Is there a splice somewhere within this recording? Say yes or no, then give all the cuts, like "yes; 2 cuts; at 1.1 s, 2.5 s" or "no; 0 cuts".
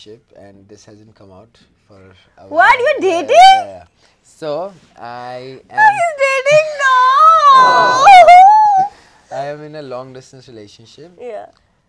no; 0 cuts